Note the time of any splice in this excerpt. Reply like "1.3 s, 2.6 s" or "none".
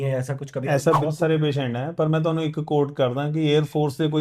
1.0 s